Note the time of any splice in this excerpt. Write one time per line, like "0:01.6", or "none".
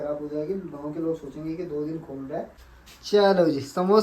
0:02.7